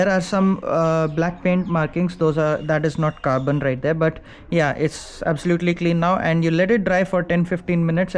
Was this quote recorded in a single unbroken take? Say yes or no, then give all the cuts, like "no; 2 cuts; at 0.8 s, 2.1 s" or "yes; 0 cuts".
yes; 0 cuts